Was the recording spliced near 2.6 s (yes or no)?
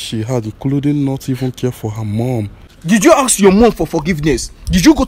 yes